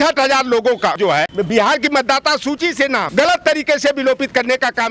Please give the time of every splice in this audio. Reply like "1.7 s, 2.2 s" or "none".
1.0 s, 3.1 s